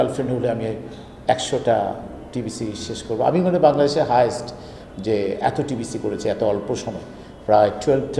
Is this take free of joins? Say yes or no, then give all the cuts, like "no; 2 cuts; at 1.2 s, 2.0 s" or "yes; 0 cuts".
yes; 0 cuts